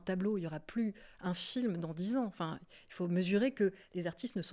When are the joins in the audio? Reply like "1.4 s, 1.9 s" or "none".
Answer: none